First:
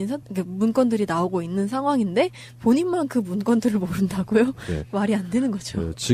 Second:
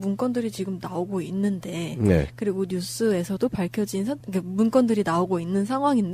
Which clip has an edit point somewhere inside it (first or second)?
second